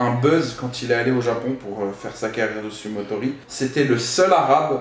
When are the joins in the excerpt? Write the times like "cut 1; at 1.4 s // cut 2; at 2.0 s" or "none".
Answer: cut 1; at 3.4 s